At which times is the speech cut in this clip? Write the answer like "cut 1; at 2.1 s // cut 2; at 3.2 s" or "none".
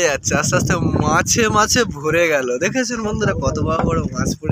none